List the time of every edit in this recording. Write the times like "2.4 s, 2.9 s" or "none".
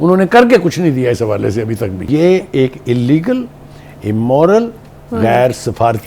2.0 s